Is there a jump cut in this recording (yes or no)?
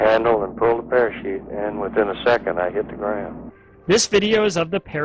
no